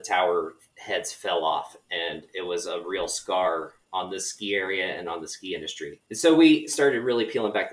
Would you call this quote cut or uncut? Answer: cut